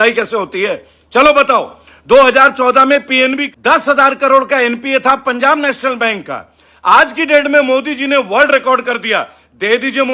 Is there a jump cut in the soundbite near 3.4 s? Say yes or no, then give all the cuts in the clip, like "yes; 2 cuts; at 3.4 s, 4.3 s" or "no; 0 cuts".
yes; 1 cut; at 3.4 s